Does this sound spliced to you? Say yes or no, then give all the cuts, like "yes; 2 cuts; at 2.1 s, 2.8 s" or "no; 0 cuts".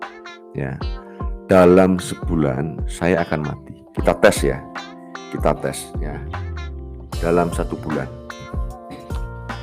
no; 0 cuts